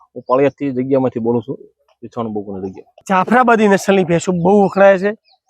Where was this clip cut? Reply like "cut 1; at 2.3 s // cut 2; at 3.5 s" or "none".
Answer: cut 1; at 3.0 s